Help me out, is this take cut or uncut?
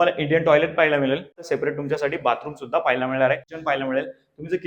cut